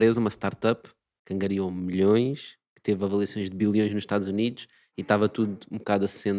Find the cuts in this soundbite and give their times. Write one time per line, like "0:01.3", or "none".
none